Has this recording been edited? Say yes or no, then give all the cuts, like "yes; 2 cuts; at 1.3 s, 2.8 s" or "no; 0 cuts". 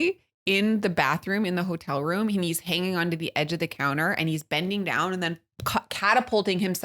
no; 0 cuts